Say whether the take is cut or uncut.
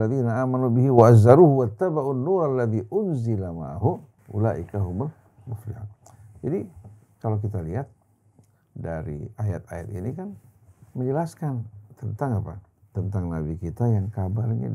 cut